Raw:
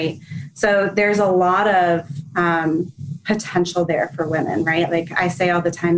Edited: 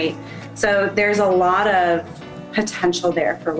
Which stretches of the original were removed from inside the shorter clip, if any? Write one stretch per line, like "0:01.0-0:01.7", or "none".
0:02.2-0:03.0